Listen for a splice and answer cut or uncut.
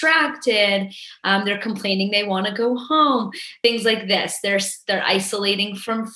cut